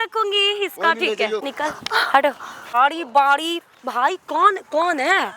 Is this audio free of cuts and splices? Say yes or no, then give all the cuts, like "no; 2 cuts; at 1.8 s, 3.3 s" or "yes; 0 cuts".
no; 2 cuts; at 1.5 s, 2.7 s